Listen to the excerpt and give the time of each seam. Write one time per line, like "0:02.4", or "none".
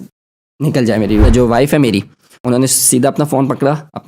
0:01.2
0:02.4